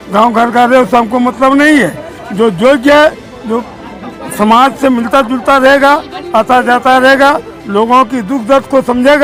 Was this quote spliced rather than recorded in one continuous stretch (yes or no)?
no